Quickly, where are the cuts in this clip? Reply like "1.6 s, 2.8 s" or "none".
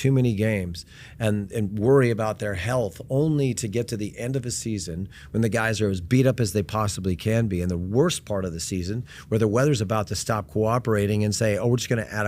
none